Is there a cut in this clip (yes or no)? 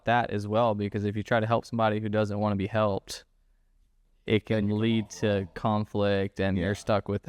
no